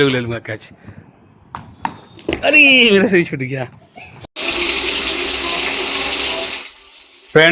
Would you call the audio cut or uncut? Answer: cut